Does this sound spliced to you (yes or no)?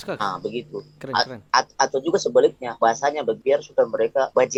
no